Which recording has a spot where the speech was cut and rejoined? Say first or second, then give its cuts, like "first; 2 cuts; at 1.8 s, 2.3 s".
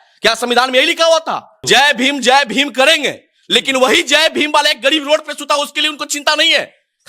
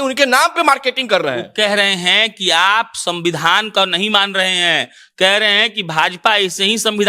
first; 1 cut; at 1.5 s